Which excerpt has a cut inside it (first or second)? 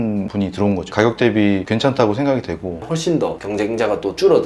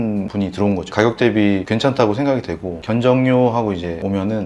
first